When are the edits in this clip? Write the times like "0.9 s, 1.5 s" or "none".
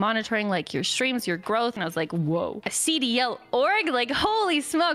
1.8 s, 2.7 s